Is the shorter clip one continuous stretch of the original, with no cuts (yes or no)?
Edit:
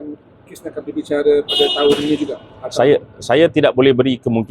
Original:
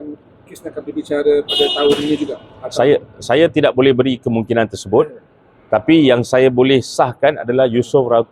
yes